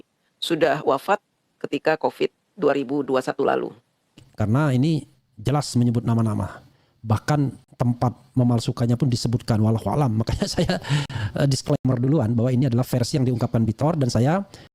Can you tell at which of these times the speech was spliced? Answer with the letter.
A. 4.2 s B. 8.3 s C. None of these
A